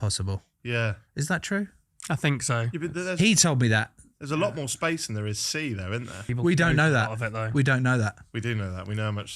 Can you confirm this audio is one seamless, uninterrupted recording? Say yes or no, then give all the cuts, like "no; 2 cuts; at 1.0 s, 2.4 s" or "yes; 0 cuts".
no; 1 cut; at 6.3 s